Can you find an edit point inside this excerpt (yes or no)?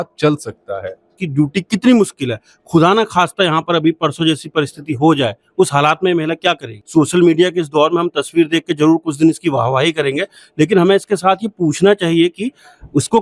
yes